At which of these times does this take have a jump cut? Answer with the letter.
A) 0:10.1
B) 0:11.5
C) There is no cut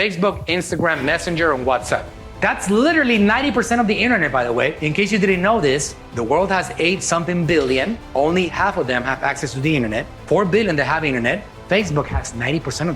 A